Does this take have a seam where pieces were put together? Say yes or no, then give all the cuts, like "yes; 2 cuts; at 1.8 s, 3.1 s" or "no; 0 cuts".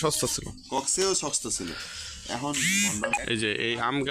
yes; 1 cut; at 3.2 s